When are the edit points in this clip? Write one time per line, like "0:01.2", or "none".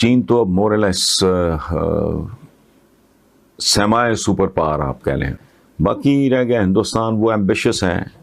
0:05.4